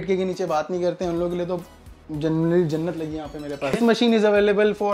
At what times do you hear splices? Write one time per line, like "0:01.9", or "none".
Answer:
0:03.8